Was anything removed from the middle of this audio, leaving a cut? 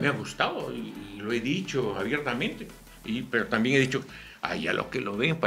no; 0 cuts

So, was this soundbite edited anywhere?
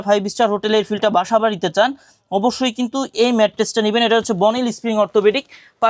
no; 0 cuts

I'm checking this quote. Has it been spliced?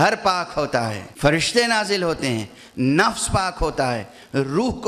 yes; 1 cut; at 1.0 s

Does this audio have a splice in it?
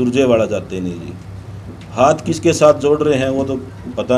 no; 0 cuts

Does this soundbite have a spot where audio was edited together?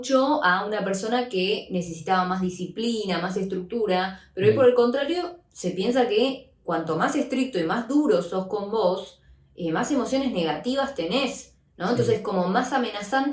no; 0 cuts

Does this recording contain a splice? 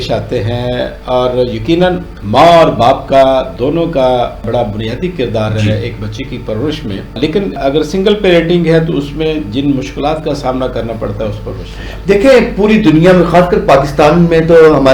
no; 0 cuts

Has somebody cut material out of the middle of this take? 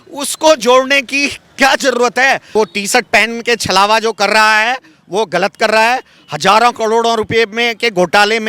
yes; 1 cut; at 2.5 s

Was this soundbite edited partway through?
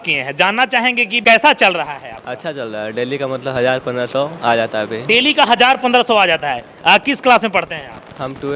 no; 0 cuts

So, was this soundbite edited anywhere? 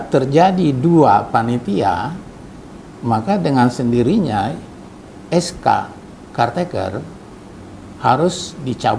no; 0 cuts

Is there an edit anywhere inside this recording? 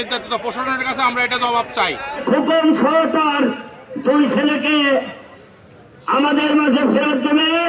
yes; 1 cut; at 2.2 s

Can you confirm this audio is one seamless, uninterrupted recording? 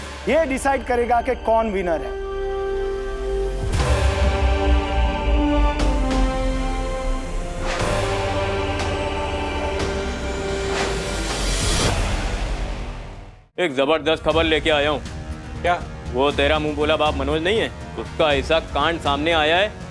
no; 1 cut; at 12.9 s

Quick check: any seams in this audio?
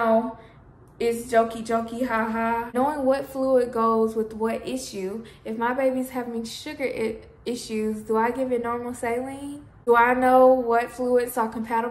yes; 2 cuts; at 2.7 s, 9.9 s

